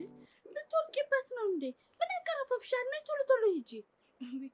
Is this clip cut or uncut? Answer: uncut